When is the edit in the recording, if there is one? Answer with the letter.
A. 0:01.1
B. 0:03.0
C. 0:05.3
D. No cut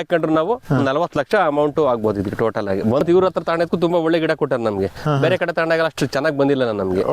B